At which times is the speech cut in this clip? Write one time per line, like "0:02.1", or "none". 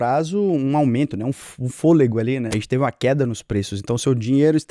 0:02.5